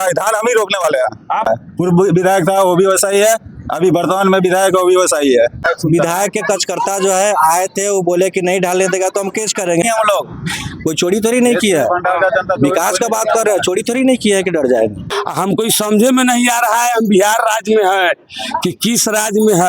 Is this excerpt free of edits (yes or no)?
no